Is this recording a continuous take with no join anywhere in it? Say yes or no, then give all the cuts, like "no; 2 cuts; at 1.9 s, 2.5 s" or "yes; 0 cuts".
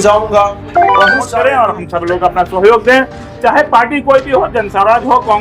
no; 1 cut; at 1.1 s